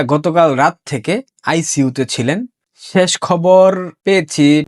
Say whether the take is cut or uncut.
uncut